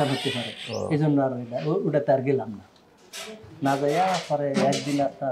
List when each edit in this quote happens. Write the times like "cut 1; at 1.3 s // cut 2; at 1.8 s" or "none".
none

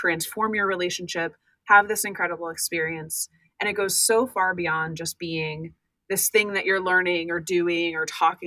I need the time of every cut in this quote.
none

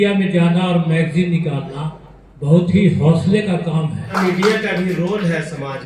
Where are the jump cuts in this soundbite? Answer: cut 1; at 4.1 s

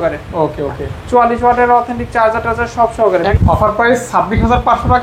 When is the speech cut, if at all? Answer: cut 1; at 3.3 s

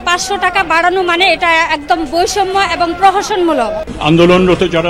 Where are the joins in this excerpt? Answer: cut 1; at 3.9 s

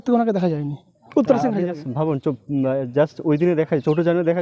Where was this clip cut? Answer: none

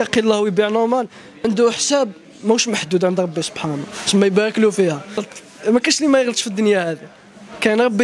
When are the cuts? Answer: cut 1; at 1.2 s // cut 2; at 5.3 s

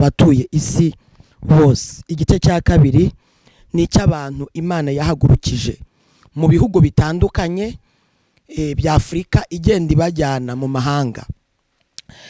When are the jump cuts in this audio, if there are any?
none

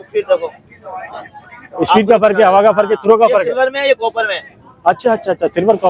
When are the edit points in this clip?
none

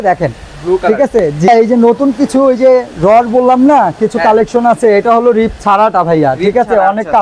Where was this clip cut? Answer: none

